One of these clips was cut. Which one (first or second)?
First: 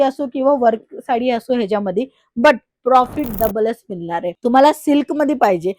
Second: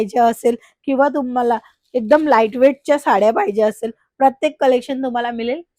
first